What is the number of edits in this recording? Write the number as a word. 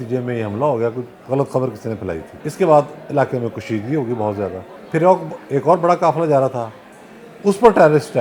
two